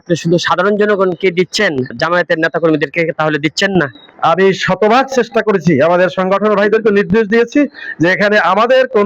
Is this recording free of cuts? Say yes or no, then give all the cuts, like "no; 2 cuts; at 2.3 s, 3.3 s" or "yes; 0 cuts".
no; 2 cuts; at 1.9 s, 4.0 s